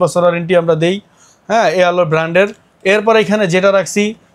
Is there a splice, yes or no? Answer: no